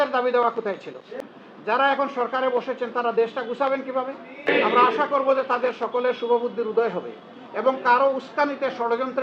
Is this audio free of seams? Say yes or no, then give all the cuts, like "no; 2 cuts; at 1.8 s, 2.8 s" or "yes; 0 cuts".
no; 2 cuts; at 1.0 s, 4.5 s